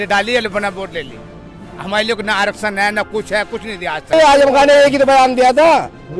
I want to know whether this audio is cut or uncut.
cut